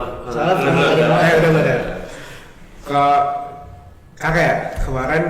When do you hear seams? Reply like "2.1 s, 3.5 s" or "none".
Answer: none